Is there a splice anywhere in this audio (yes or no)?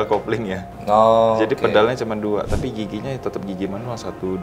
no